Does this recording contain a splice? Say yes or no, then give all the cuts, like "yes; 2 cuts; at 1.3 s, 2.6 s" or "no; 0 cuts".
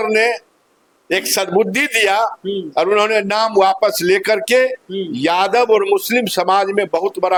no; 0 cuts